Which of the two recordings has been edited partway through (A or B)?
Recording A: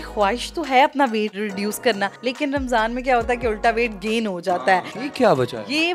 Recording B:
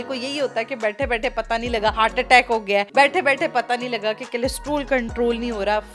A